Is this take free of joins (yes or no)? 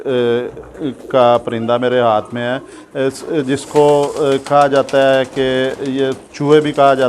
yes